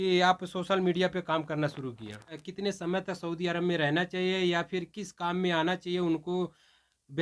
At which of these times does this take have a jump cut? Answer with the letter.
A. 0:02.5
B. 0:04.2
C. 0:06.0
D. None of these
A